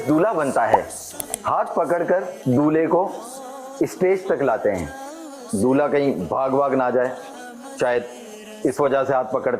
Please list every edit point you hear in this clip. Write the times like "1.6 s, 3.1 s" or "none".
1.3 s